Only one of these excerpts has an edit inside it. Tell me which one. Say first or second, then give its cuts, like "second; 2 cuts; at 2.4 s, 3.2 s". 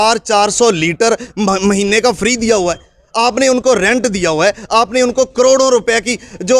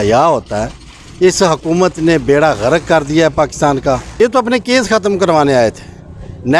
second; 1 cut; at 4.2 s